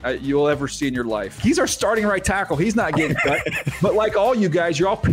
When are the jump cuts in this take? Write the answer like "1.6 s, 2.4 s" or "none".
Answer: 1.4 s